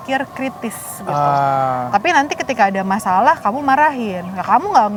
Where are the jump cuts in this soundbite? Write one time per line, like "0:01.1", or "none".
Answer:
none